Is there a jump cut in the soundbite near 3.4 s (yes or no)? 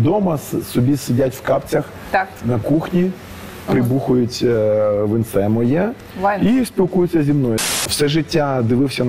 no